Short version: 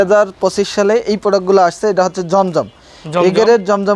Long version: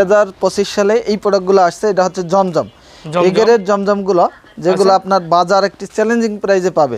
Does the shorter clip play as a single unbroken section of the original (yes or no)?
yes